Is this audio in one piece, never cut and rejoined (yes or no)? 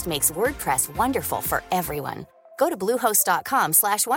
yes